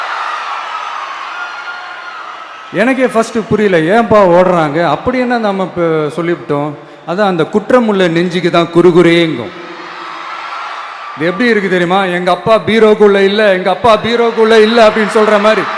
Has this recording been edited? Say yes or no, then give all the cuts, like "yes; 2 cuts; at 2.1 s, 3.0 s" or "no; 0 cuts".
no; 0 cuts